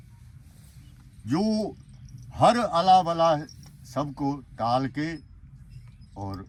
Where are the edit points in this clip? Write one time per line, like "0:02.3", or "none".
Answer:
none